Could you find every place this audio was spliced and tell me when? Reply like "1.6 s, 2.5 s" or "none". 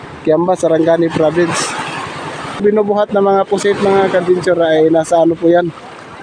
2.6 s